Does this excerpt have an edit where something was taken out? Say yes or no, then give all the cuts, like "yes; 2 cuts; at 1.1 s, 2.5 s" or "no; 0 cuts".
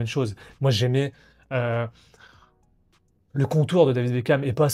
no; 0 cuts